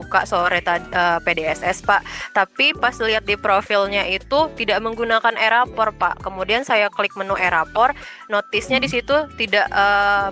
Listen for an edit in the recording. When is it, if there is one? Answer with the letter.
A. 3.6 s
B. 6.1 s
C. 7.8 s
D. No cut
D